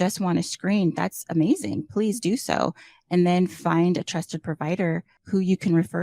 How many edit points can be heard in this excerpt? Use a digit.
1